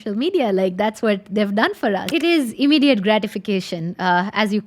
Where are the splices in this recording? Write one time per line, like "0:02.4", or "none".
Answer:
0:02.1